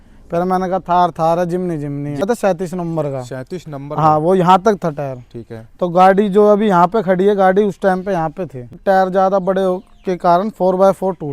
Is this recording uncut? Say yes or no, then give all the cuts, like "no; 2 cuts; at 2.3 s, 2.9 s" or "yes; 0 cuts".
no; 2 cuts; at 2.2 s, 8.7 s